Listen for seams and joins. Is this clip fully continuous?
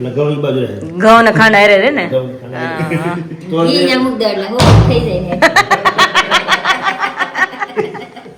yes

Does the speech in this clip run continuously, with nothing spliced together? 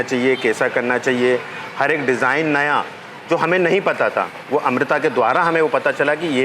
yes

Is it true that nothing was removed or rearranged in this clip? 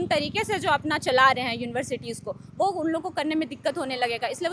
yes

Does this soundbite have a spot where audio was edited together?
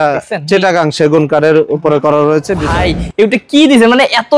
yes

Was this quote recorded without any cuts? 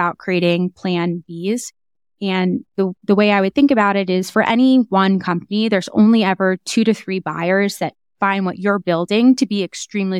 yes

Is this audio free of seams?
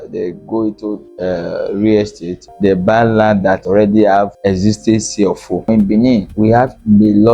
no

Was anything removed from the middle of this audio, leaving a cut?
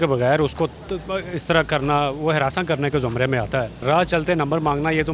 yes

